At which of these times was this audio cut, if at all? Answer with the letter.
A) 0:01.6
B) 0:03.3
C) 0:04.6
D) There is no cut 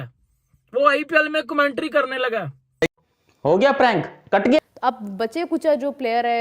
C